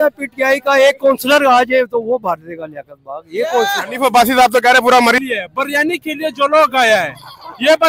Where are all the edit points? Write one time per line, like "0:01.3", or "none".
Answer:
0:05.2